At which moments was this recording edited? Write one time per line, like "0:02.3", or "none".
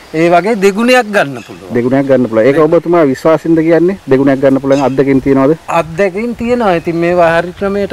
none